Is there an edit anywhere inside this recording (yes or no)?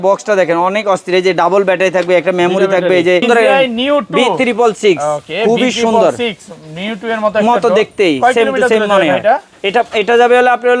yes